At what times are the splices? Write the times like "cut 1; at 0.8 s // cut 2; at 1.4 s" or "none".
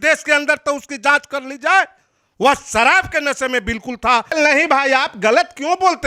cut 1; at 4.3 s